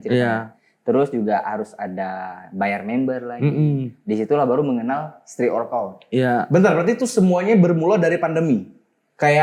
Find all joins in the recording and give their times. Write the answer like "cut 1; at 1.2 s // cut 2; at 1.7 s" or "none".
none